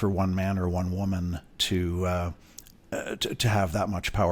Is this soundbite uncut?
yes; 0 cuts

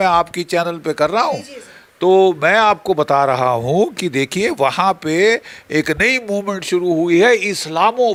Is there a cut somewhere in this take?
no; 0 cuts

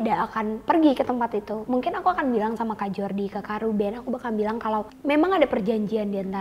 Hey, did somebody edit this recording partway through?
yes; 1 cut; at 4.9 s

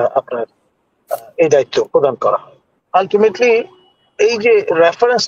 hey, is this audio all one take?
no; 1 cut; at 2.7 s

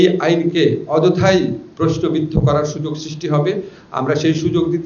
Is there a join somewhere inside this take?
no; 0 cuts

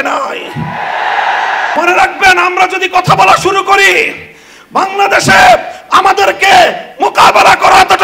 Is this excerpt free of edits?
no; 1 cut; at 1.7 s

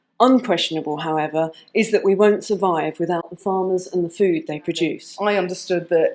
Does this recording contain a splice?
yes; 1 cut; at 5.1 s

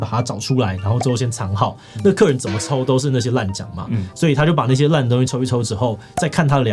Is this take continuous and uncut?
yes; 0 cuts

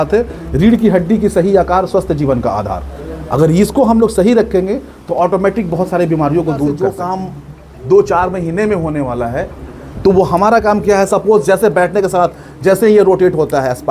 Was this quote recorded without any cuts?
no; 1 cut; at 6.9 s

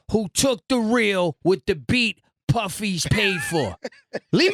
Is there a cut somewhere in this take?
no; 0 cuts

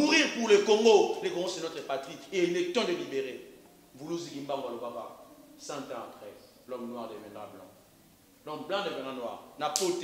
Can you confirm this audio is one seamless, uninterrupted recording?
yes; 0 cuts

